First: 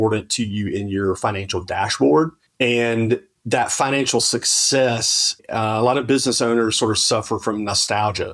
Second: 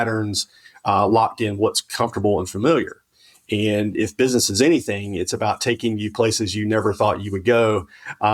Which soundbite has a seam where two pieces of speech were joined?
first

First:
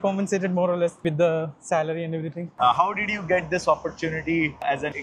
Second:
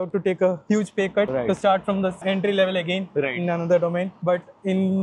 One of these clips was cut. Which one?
first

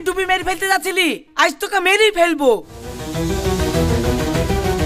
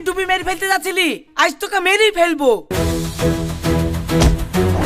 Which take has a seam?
second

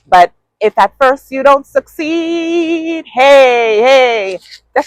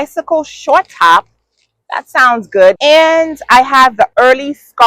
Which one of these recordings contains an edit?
second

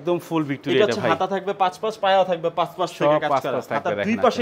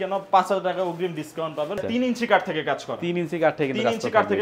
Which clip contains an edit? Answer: second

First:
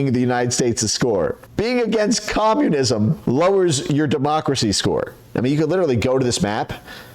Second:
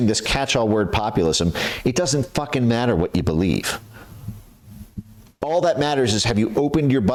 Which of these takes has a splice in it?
first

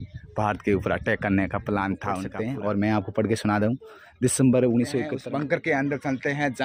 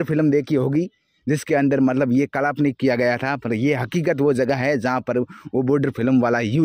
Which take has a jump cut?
first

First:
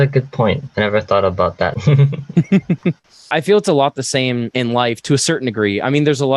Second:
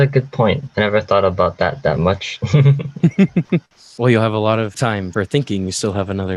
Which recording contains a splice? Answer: first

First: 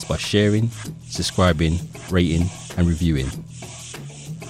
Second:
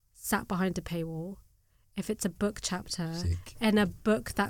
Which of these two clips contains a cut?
first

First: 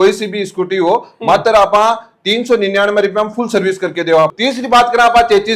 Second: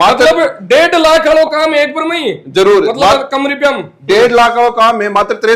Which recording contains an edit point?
first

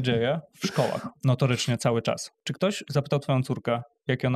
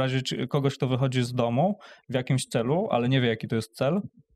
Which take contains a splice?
first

